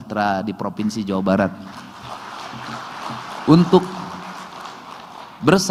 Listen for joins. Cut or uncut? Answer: uncut